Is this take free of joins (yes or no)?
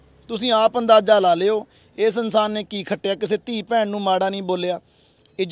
yes